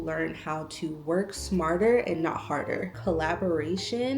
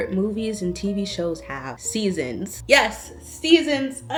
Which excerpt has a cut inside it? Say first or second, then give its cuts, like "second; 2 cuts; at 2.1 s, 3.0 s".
first; 1 cut; at 2.9 s